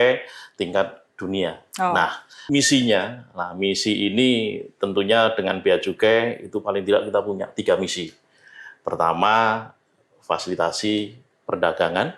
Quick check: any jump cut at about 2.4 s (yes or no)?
yes